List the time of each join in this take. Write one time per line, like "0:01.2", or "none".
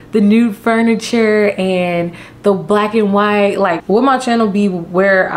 0:03.8